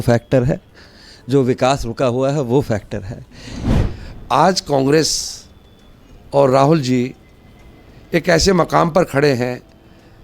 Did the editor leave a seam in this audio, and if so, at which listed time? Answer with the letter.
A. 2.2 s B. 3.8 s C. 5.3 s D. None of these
B